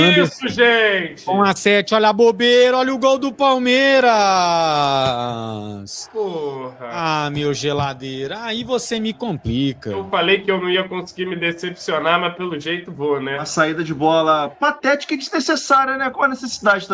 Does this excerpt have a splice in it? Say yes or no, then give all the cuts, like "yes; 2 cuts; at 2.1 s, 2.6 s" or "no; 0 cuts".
yes; 3 cuts; at 7.0 s, 10.1 s, 13.5 s